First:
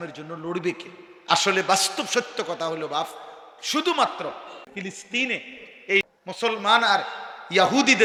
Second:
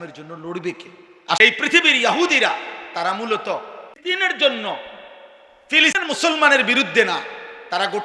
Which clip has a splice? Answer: second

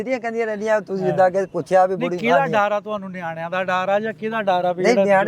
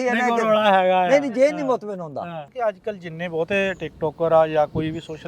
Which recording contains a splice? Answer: second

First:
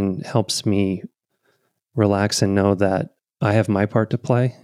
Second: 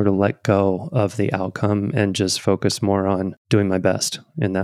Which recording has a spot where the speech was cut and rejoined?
second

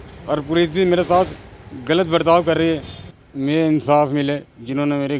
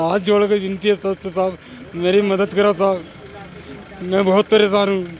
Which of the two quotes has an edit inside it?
first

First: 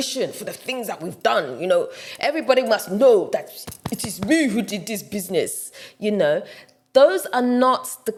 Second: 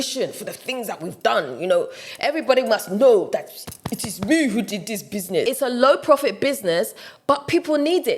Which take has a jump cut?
second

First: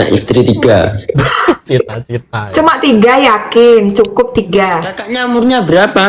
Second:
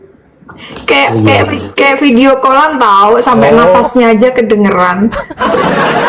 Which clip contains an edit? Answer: first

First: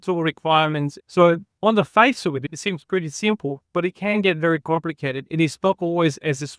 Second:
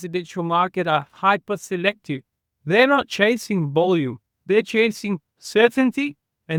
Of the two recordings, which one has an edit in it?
first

